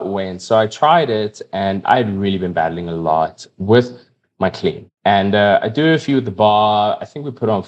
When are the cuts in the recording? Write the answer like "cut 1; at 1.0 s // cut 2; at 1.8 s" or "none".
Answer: cut 1; at 1.8 s // cut 2; at 3.5 s // cut 3; at 4.9 s